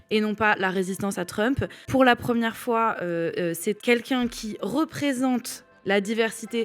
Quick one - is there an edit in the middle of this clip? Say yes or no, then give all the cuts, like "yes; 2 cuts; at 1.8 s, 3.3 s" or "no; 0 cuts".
yes; 2 cuts; at 1.8 s, 3.8 s